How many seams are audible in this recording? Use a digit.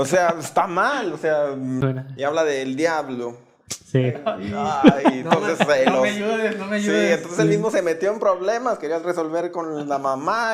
1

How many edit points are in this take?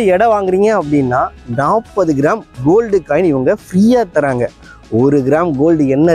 0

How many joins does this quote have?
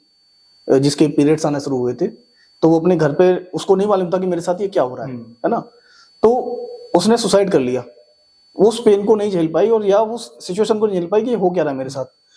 0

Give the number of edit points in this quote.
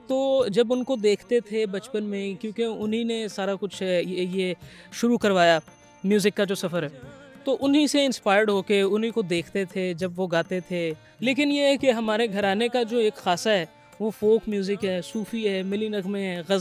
1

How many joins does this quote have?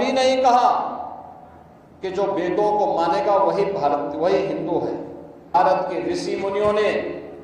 1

